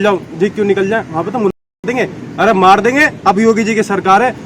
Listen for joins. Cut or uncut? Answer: uncut